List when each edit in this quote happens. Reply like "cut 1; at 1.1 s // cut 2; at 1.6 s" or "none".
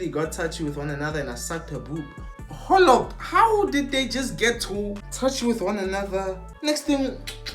cut 1; at 5.0 s // cut 2; at 6.5 s